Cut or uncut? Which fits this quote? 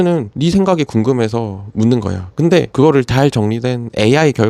uncut